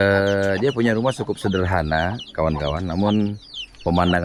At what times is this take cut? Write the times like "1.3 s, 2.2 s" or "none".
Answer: none